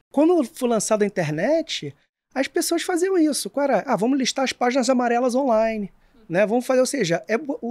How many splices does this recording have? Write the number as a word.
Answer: zero